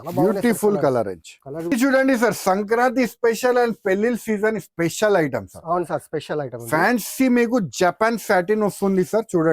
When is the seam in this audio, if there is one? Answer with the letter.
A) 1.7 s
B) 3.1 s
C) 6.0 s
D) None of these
A